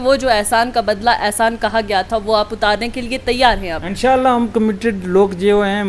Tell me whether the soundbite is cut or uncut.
uncut